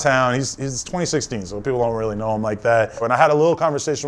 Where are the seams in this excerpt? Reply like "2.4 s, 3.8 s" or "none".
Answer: 3.0 s